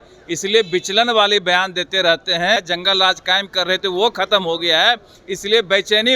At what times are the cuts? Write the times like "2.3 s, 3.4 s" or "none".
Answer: 2.6 s